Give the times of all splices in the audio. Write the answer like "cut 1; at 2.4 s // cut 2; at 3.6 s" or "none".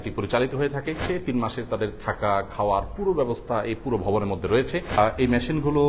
cut 1; at 1.0 s // cut 2; at 4.9 s